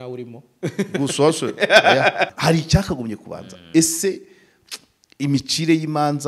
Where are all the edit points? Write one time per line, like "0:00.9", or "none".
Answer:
0:02.3